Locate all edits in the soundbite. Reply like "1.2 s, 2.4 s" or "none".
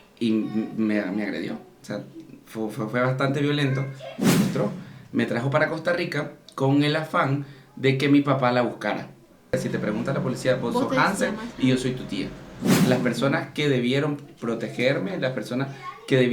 4.3 s, 9.5 s, 12.8 s